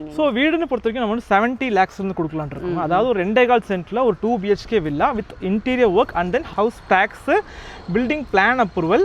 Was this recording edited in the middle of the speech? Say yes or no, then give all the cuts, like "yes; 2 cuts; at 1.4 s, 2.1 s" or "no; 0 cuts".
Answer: no; 0 cuts